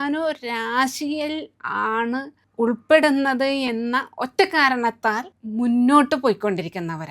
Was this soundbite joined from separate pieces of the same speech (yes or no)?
yes